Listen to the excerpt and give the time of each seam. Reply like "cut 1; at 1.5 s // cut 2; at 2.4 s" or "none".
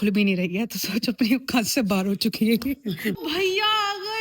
cut 1; at 3.2 s